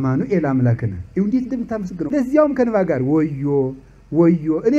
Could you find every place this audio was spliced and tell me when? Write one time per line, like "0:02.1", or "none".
0:02.0